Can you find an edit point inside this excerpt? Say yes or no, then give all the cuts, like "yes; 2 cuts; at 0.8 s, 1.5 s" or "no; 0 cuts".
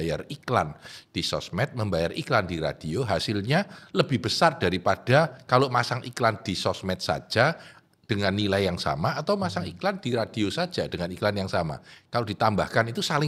no; 0 cuts